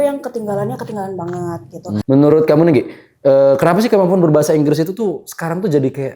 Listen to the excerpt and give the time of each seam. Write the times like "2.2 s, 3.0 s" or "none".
2.0 s